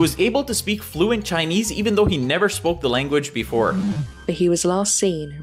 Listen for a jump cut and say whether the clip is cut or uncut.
cut